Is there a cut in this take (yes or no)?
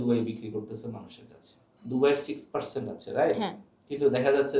no